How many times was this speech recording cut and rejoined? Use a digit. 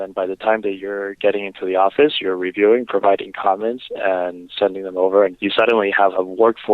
1